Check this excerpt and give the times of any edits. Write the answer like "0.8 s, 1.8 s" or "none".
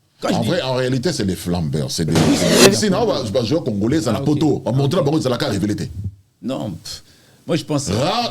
2.6 s